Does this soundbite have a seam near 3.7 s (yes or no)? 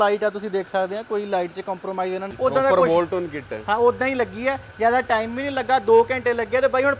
no